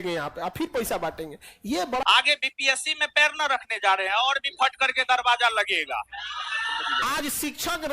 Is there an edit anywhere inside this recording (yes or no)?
yes